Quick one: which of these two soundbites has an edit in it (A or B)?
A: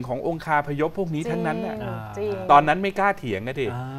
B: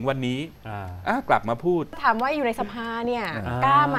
B